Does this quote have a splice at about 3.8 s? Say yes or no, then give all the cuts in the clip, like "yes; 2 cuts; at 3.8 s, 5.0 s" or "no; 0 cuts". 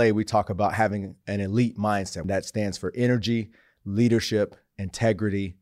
no; 1 cut; at 2.2 s